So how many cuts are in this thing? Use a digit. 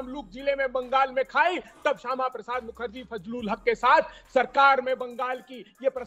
0